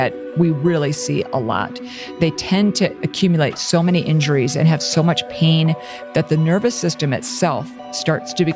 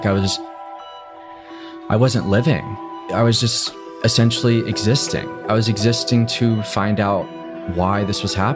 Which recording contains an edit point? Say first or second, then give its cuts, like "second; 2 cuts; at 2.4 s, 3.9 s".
first; 2 cuts; at 2.0 s, 5.9 s